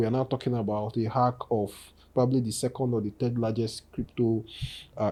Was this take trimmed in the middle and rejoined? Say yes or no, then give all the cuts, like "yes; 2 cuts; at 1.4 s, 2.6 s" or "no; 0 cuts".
no; 0 cuts